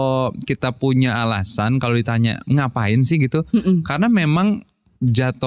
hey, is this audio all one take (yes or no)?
yes